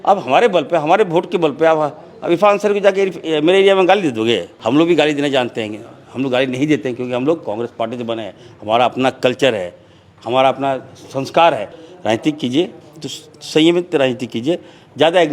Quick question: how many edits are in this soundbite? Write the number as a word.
two